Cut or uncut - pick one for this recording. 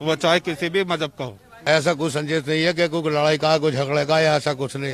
cut